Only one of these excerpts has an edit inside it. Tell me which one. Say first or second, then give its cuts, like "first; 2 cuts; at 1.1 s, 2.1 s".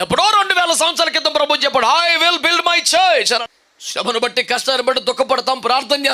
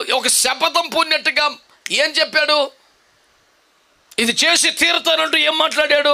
first; 1 cut; at 3.4 s